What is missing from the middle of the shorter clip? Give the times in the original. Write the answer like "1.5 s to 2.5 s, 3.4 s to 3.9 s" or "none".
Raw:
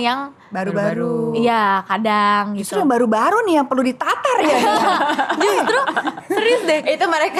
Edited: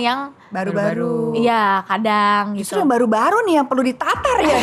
none